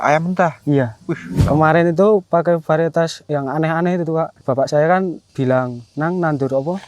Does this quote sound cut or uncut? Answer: cut